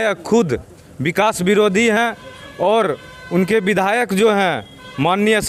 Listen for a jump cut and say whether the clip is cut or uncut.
uncut